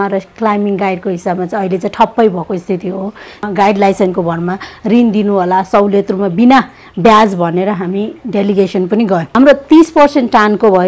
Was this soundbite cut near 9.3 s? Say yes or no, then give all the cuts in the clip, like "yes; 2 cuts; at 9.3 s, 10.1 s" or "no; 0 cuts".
yes; 2 cuts; at 3.4 s, 9.3 s